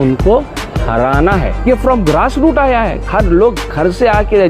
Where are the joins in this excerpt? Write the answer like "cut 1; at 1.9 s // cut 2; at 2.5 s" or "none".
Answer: cut 1; at 1.5 s